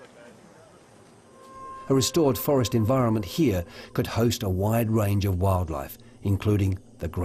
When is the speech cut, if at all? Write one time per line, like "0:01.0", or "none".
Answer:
none